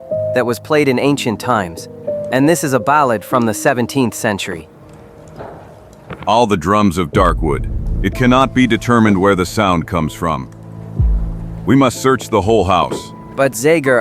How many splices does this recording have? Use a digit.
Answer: 1